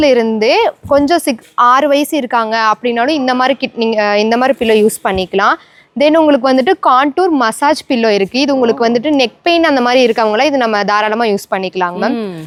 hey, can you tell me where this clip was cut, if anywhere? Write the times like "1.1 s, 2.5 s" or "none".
none